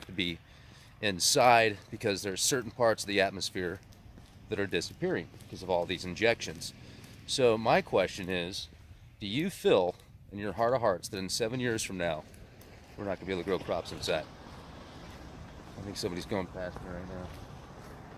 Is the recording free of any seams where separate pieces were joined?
yes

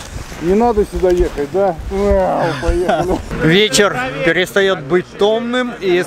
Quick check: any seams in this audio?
yes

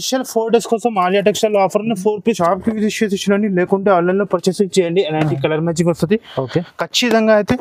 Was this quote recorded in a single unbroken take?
no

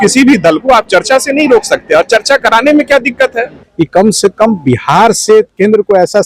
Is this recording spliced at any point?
yes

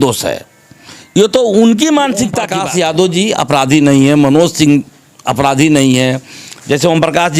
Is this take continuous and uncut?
no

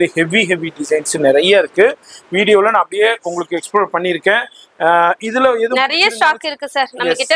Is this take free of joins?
yes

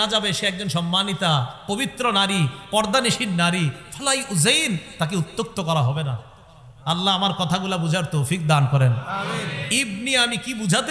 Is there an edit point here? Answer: no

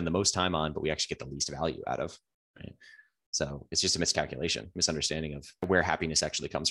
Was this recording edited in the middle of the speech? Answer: yes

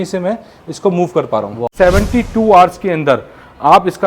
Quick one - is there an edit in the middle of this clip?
yes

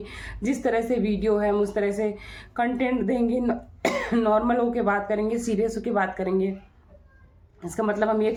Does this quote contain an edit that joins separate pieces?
no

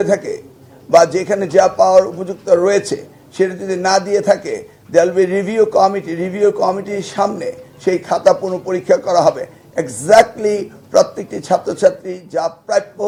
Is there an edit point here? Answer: no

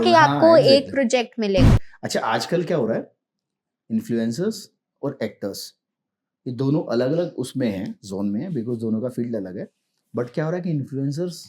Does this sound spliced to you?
yes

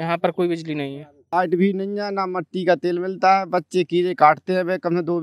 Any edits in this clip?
yes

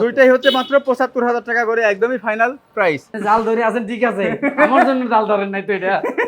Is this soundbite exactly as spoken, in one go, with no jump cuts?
no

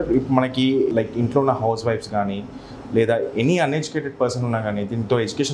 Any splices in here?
yes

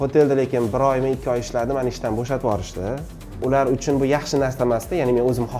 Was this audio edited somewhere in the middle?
yes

